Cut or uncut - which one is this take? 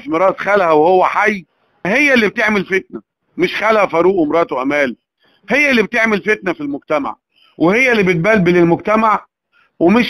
cut